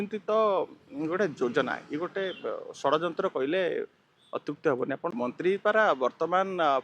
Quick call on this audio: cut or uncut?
cut